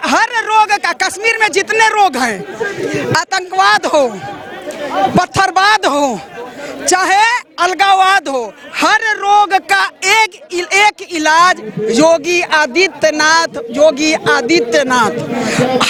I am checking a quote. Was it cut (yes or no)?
no